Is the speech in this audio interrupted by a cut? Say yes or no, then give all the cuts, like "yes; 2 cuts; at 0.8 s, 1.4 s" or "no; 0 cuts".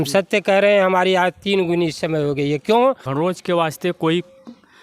yes; 1 cut; at 3.0 s